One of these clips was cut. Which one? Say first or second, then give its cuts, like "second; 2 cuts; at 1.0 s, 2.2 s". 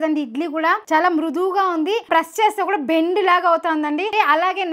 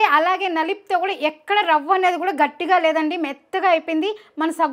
first; 2 cuts; at 0.8 s, 2.1 s